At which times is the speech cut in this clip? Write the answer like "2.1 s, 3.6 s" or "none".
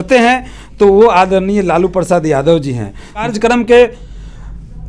3.3 s